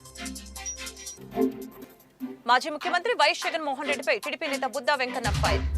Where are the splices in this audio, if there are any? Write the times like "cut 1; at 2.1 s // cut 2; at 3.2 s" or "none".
cut 1; at 1.1 s